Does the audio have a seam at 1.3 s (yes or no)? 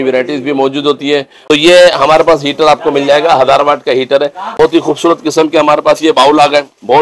yes